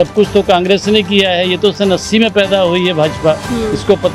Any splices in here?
no; 0 cuts

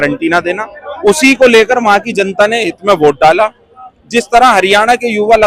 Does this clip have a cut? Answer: no; 0 cuts

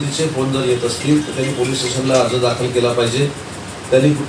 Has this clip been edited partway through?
no; 0 cuts

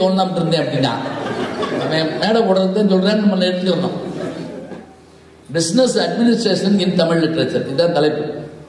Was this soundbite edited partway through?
yes; 1 cut; at 4.6 s

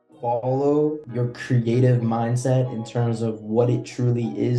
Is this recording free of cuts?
no; 1 cut; at 1.0 s

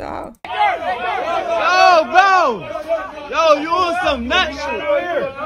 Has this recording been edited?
no; 0 cuts

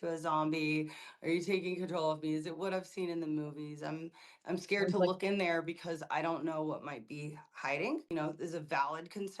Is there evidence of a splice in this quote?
yes; 1 cut; at 8.1 s

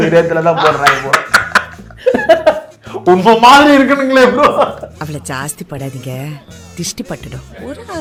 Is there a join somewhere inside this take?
no; 0 cuts

